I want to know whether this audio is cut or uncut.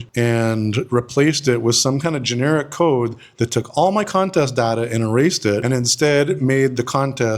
uncut